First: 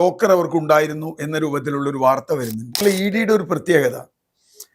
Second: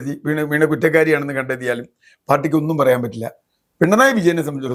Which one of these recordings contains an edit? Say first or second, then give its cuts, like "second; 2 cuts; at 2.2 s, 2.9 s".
first; 1 cut; at 2.8 s